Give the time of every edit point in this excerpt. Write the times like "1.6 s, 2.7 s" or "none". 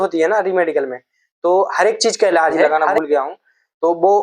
2.8 s